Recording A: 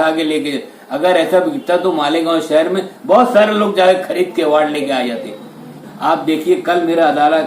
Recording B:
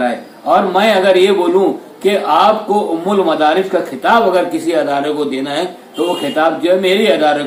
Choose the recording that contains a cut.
A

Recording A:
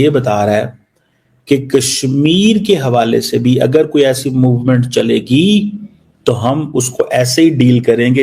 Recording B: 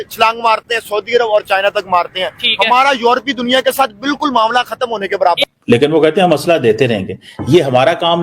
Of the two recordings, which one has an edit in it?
B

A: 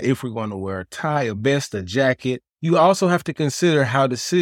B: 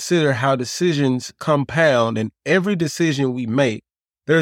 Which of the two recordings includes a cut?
A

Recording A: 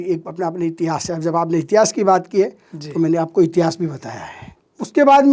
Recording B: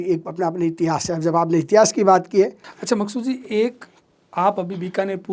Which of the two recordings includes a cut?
B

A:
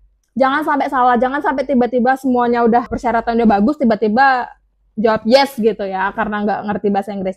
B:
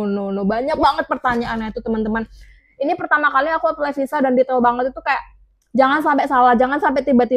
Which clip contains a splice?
A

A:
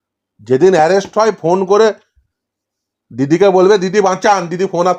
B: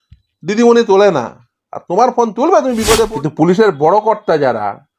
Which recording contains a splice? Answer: B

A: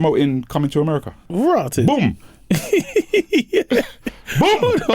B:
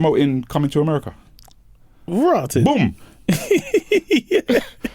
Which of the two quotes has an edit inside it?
A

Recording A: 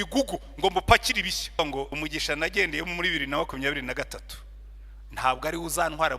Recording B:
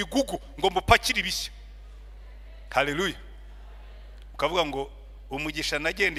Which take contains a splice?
A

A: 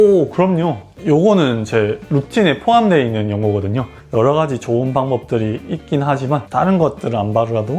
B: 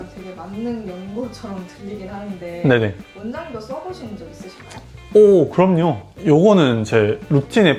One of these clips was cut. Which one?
A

